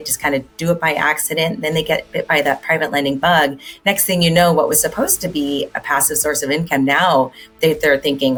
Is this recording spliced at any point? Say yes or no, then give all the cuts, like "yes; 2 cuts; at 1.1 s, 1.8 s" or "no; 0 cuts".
no; 0 cuts